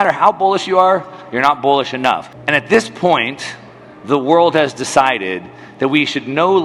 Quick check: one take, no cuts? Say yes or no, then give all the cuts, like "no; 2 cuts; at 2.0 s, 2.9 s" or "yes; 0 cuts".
no; 1 cut; at 2.3 s